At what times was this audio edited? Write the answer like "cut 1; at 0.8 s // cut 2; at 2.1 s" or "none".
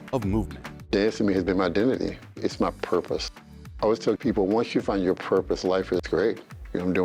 none